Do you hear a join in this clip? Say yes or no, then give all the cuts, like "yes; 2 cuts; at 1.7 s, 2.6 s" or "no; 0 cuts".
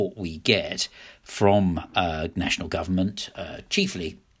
no; 0 cuts